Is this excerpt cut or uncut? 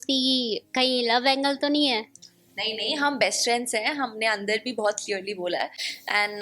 uncut